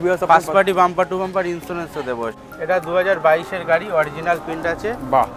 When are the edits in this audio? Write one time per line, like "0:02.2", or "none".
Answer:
0:02.4

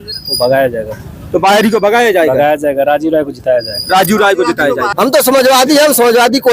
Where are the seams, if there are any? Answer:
0:04.9

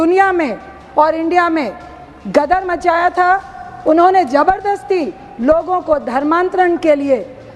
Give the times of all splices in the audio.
none

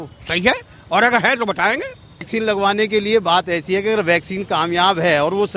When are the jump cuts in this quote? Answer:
0:02.3

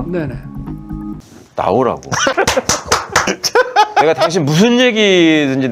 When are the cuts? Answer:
0:01.1
0:02.3

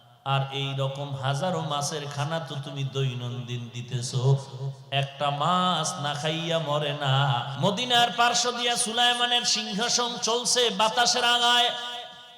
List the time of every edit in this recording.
0:07.5

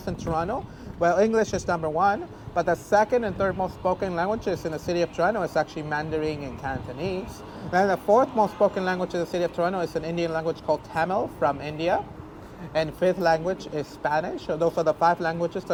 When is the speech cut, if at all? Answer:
none

